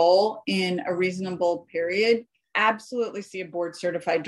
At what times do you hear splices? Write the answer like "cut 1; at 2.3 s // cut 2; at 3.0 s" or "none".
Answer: cut 1; at 2.4 s